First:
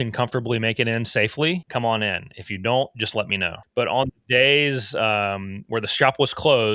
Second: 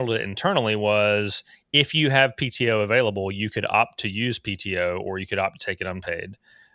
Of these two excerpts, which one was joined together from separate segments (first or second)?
first